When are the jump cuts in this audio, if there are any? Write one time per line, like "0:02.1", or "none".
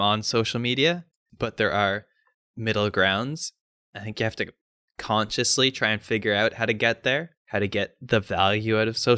0:01.2
0:07.4